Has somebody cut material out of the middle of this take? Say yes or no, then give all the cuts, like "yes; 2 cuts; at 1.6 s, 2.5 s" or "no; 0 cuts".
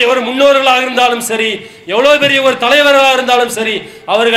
no; 0 cuts